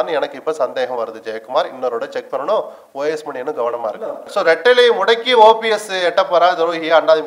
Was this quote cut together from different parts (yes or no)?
yes